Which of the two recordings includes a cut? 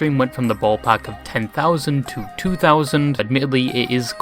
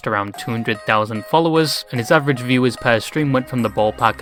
first; 1 cut; at 3.2 s

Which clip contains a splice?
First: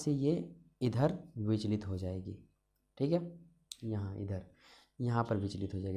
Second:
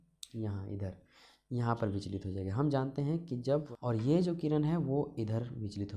second; 1 cut; at 3.7 s

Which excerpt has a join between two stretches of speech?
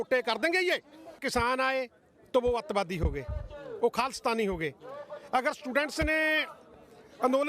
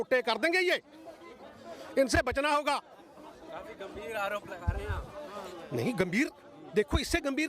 first; 1 cut; at 1.2 s

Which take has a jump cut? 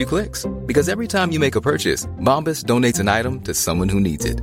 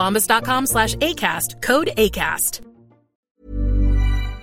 second; 1 cut; at 3.1 s

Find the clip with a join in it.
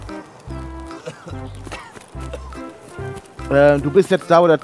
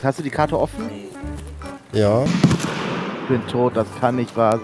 second; 1 cut; at 2.3 s

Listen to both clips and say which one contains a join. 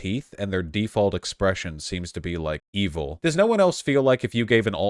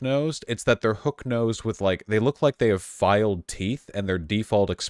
first; 1 cut; at 3.1 s

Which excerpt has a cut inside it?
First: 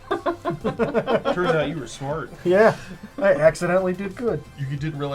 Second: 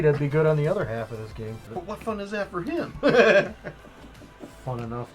second; 1 cut; at 1.6 s

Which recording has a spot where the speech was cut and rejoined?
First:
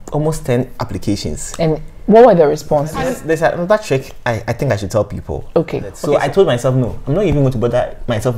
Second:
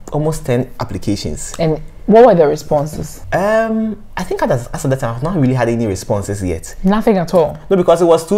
first; 2 cuts; at 3.2 s, 5.9 s

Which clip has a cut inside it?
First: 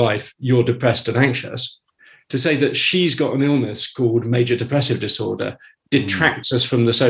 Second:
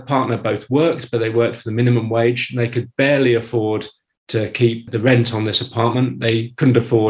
second; 1 cut; at 4.9 s

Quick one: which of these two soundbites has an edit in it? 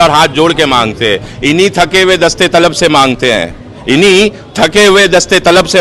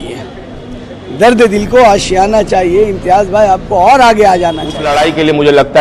second; 1 cut; at 4.8 s

